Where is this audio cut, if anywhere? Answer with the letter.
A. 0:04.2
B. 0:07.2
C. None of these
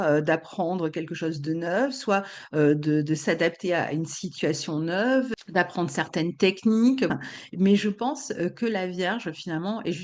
B